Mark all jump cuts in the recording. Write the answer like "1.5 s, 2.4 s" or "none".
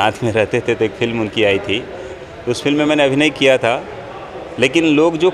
2.2 s